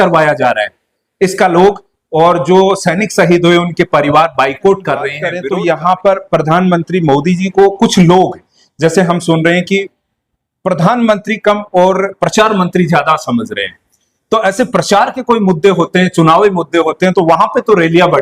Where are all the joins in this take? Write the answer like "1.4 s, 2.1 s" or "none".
5.3 s